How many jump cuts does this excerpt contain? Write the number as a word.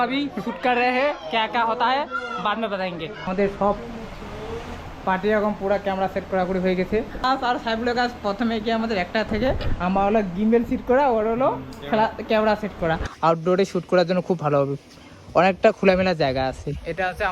three